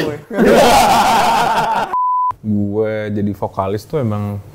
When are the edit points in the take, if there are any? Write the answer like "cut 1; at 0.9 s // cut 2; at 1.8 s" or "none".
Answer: cut 1; at 2.0 s